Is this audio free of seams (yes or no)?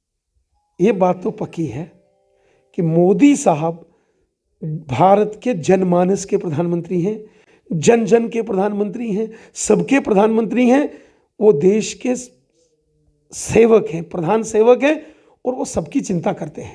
yes